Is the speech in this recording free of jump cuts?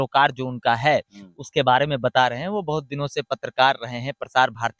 yes; 0 cuts

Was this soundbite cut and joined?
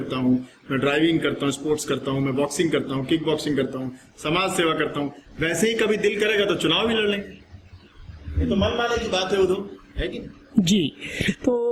no; 0 cuts

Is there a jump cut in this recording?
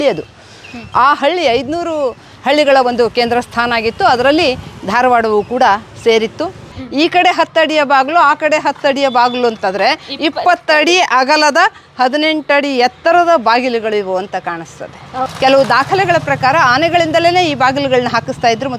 yes; 2 cuts; at 6.8 s, 15.2 s

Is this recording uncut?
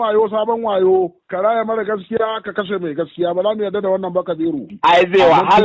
no; 1 cut; at 4.6 s

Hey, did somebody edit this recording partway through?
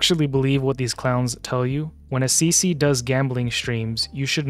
no; 0 cuts

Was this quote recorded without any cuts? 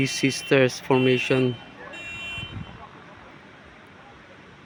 yes; 0 cuts

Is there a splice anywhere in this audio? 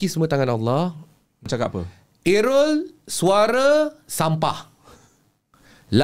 yes; 1 cut; at 1.5 s

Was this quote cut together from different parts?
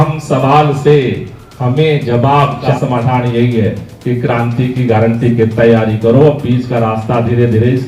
yes; 1 cut; at 2.6 s

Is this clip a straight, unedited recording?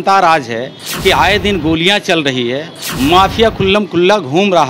yes; 0 cuts

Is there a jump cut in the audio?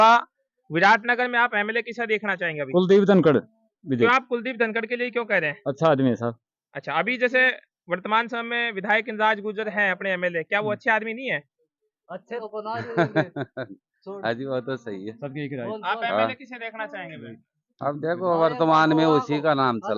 yes; 1 cut; at 12.4 s

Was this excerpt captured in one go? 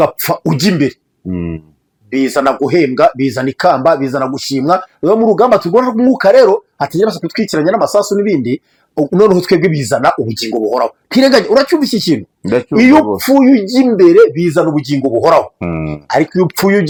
yes; 0 cuts

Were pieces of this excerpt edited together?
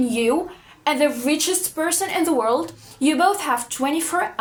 no; 0 cuts

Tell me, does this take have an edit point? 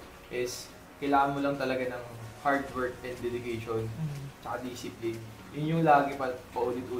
no; 0 cuts

